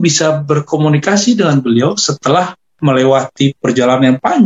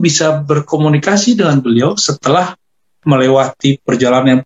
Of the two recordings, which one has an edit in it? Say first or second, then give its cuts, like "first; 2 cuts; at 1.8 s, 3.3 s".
first; 1 cut; at 2.6 s